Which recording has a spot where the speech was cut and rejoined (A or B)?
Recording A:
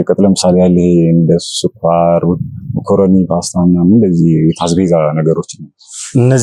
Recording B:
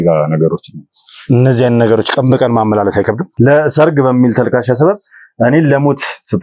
B